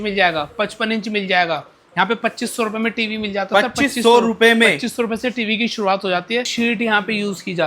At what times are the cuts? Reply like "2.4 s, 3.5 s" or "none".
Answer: 6.5 s